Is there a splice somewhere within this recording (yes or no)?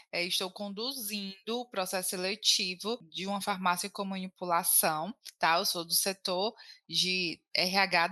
yes